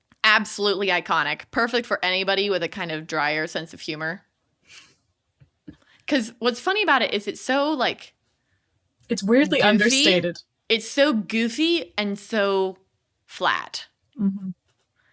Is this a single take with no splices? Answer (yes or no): yes